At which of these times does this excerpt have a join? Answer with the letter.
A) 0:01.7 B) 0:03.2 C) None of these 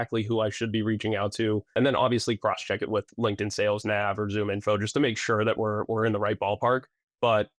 A